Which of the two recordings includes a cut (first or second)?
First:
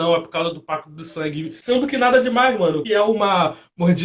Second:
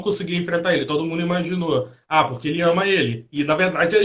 first